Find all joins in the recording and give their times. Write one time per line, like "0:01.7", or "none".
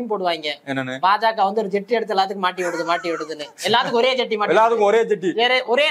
none